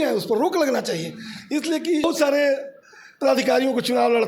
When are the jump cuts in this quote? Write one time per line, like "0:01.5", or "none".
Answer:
0:02.0